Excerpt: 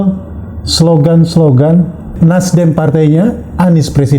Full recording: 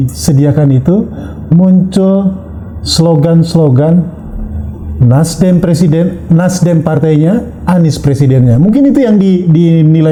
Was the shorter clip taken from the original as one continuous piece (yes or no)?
no